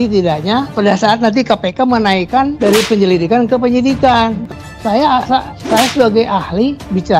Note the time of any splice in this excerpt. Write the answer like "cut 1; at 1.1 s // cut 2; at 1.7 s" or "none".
cut 1; at 4.5 s